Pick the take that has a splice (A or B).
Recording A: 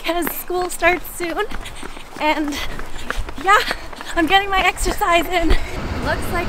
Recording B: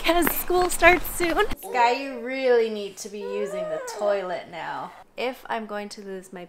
B